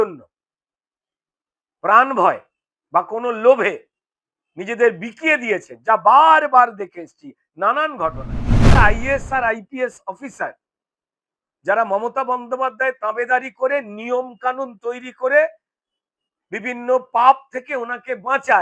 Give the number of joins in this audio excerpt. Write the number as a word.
one